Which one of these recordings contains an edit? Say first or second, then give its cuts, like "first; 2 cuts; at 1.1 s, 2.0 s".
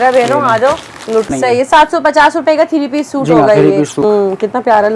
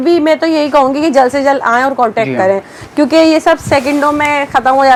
first; 2 cuts; at 1.3 s, 4.0 s